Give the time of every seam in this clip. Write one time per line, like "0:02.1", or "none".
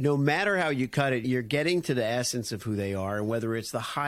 0:01.2